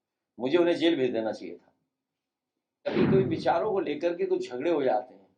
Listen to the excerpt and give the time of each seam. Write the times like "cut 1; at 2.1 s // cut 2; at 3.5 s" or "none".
cut 1; at 2.8 s

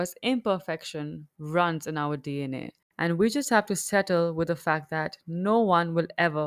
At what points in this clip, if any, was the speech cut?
cut 1; at 2.8 s

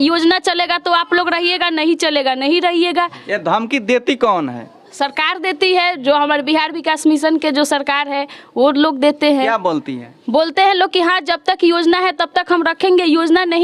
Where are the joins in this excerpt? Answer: none

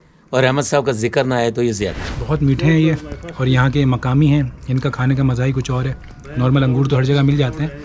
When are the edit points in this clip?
cut 1; at 2.1 s

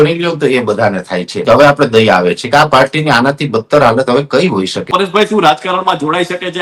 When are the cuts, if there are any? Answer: cut 1; at 1.4 s // cut 2; at 4.8 s

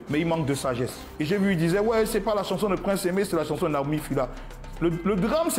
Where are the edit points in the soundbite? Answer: cut 1; at 1.0 s

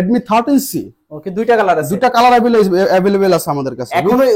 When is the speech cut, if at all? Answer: none

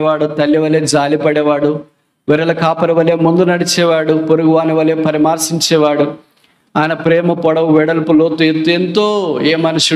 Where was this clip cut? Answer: none

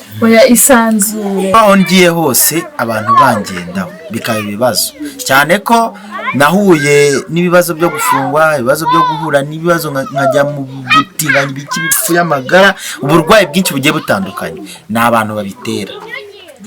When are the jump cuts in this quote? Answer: cut 1; at 1.5 s

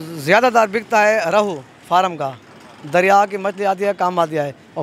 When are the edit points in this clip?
none

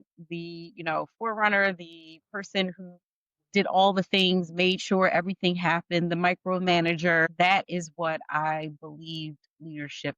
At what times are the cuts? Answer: cut 1; at 7.3 s

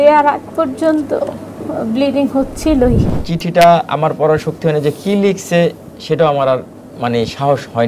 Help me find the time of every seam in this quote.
cut 1; at 3.2 s

